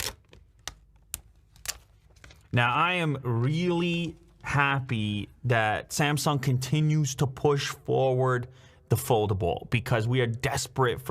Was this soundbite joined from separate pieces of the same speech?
no; 0 cuts

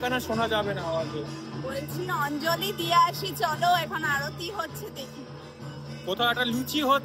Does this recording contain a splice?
no; 0 cuts

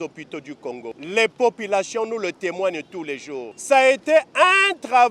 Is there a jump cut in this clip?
yes; 2 cuts; at 1.0 s, 3.5 s

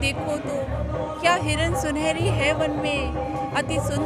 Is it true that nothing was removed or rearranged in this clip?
yes; 0 cuts

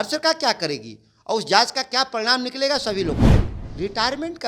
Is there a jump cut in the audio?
yes; 1 cut; at 3.2 s

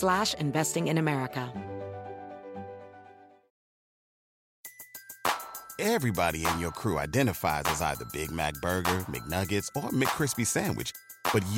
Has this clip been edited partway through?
yes; 1 cut; at 1.5 s

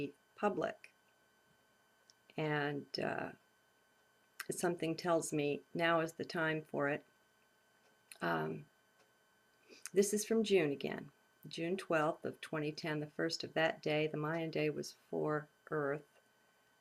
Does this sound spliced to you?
yes; 1 cut; at 8.2 s

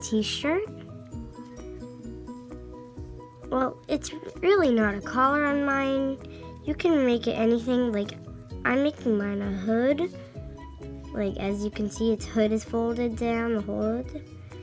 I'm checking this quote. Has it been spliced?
no; 0 cuts

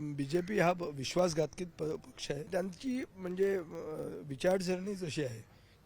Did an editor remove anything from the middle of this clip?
yes; 1 cut; at 2.5 s

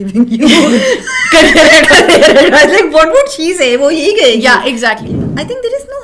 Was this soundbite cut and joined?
yes; 1 cut; at 5.1 s

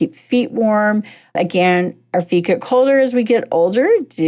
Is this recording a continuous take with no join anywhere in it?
yes; 0 cuts

